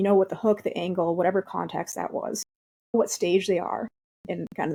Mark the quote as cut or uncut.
uncut